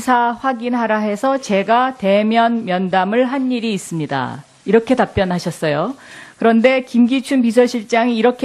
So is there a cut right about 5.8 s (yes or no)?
no